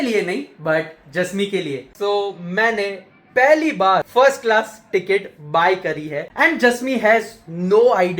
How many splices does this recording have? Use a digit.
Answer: 3